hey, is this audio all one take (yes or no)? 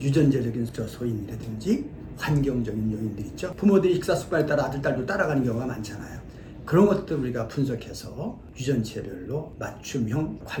yes